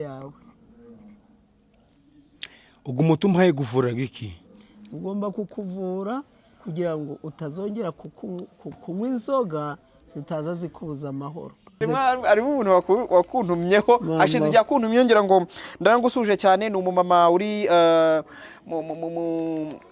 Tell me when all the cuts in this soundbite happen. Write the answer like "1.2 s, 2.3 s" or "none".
11.8 s